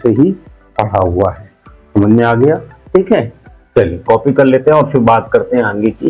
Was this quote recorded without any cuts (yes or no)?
yes